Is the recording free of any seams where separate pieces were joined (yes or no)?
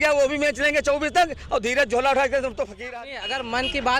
no